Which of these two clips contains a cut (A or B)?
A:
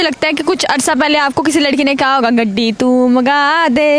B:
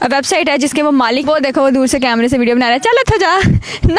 B